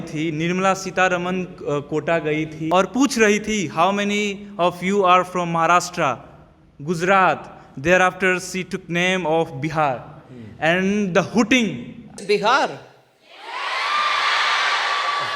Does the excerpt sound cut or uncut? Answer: cut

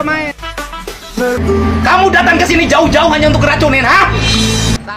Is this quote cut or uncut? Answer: uncut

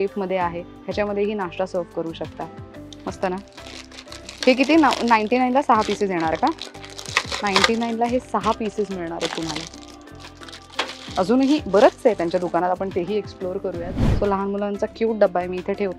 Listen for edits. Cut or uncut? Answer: uncut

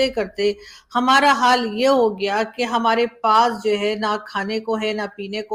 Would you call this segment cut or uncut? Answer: uncut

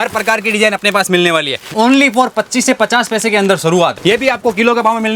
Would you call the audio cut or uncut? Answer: cut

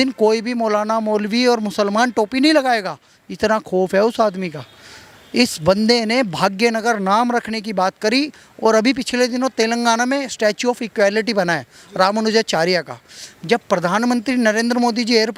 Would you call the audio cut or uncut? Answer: uncut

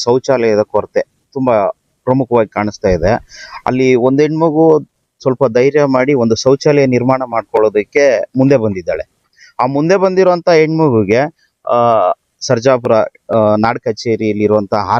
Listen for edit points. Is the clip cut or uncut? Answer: uncut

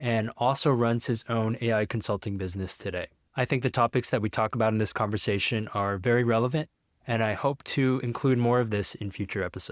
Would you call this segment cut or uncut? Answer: cut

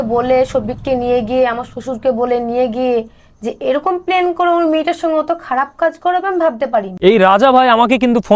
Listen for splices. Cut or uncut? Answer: cut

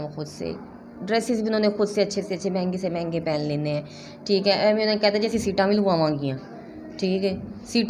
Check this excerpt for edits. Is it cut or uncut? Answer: uncut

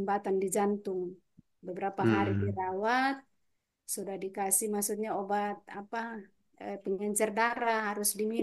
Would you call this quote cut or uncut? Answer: uncut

